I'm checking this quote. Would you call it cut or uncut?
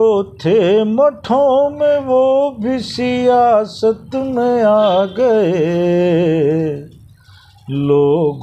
uncut